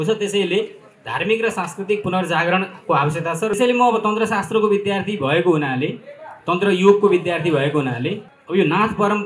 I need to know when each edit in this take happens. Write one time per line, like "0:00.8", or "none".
0:03.5
0:08.3